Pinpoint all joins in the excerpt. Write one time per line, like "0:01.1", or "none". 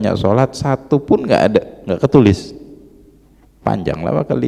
none

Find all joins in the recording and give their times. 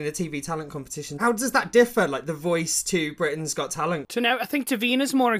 0:01.2
0:04.1

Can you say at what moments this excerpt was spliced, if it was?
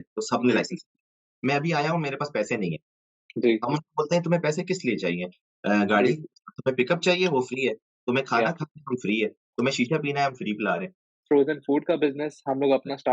0:01.2
0:11.1

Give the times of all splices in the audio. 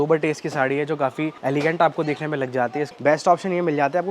0:01.4
0:02.9

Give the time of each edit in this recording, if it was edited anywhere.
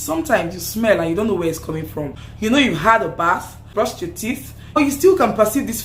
0:02.2
0:03.6
0:04.8

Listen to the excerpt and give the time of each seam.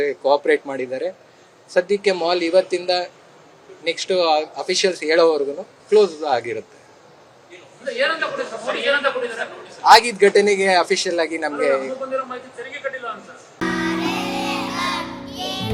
none

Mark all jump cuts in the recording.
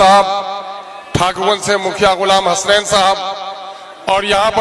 none

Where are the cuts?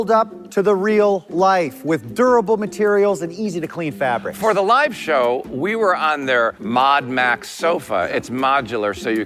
none

